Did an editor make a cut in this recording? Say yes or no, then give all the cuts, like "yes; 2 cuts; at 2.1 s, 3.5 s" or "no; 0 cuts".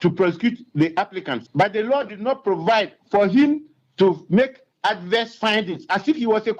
yes; 1 cut; at 1.4 s